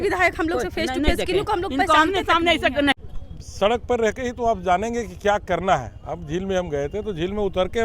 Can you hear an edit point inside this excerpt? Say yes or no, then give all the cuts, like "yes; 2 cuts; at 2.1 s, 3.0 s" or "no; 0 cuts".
yes; 1 cut; at 3.0 s